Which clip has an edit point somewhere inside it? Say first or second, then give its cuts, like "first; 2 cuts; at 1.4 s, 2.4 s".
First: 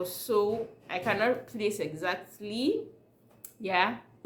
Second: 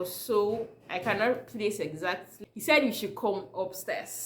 second; 1 cut; at 2.4 s